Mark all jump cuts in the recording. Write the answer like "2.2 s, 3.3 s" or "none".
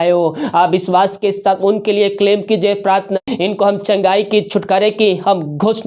3.2 s